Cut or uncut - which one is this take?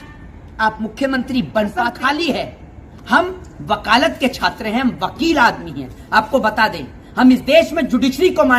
cut